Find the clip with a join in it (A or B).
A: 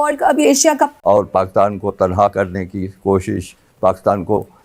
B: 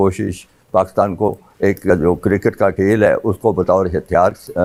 A